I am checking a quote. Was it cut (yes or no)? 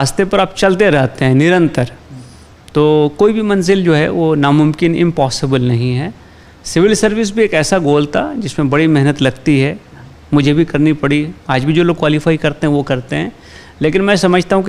no